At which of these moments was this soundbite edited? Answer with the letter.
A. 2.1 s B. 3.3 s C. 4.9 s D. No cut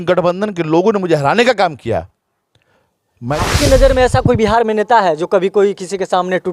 B